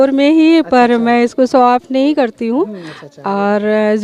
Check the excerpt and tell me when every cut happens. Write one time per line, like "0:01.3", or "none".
none